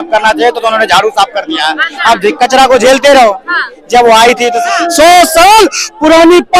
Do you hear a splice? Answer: yes; 1 cut; at 4.6 s

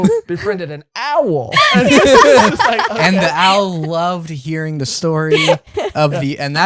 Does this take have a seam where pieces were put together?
yes; 1 cut; at 1.5 s

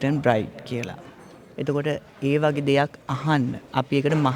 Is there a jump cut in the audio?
no; 0 cuts

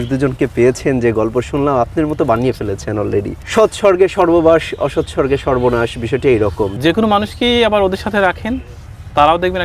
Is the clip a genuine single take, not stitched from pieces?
no; 2 cuts; at 3.4 s, 6.7 s

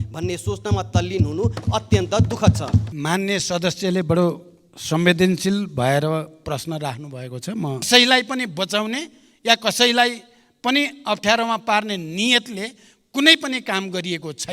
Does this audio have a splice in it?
yes; 2 cuts; at 2.9 s, 7.9 s

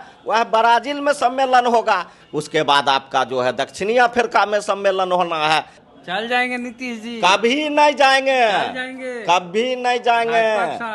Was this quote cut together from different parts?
yes; 2 cuts; at 2.2 s, 5.8 s

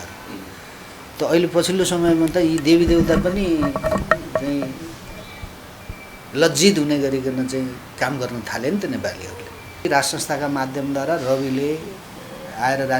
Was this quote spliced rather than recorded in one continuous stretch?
yes; 1 cut; at 9.8 s

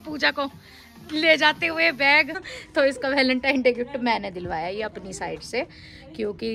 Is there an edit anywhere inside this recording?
yes; 1 cut; at 2.5 s

